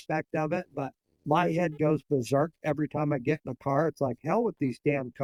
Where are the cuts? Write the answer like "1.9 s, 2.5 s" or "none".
none